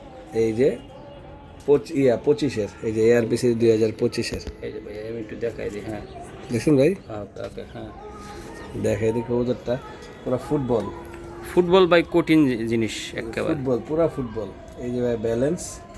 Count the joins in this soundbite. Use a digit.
0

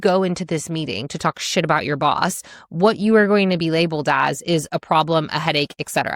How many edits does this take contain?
0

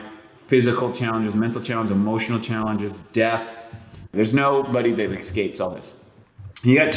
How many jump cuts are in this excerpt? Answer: 1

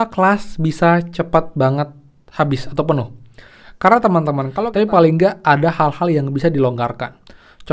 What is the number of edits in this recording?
1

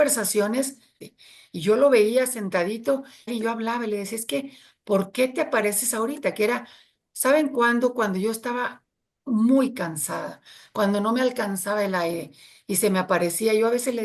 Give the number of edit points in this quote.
2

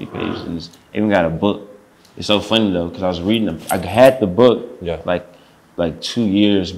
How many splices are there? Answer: 0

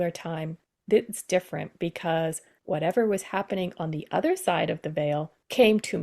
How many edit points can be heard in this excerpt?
1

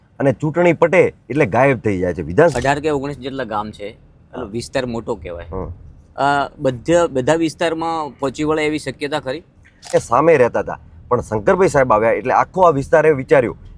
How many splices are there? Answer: 2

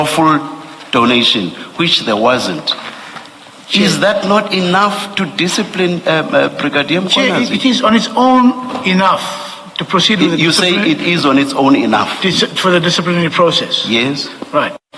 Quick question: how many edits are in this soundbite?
0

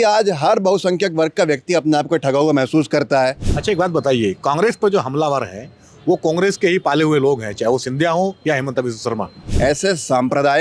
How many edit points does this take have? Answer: 2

